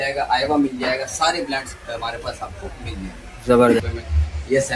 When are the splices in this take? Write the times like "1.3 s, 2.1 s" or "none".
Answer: 3.9 s